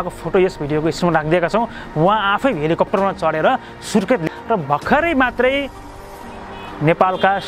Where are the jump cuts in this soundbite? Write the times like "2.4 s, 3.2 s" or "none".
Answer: 4.2 s

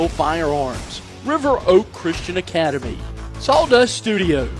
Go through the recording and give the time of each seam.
none

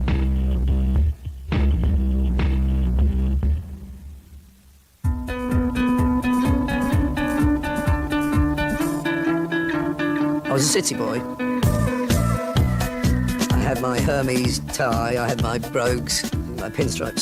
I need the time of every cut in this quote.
none

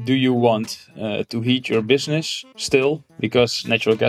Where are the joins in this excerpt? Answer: 3.1 s

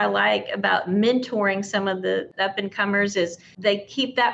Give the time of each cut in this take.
2.3 s, 3.5 s

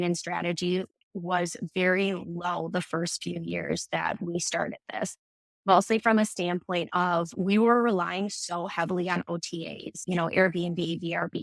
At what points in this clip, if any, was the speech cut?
7.3 s, 10.0 s

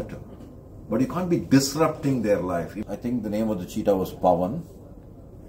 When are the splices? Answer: 2.7 s

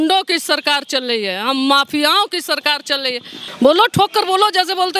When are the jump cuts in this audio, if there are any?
3.3 s

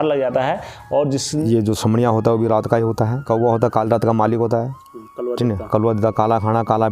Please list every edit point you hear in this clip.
1.4 s, 3.2 s

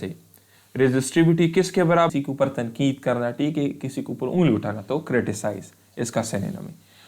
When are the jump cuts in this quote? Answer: 2.1 s

